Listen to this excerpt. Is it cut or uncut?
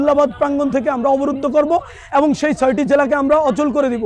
uncut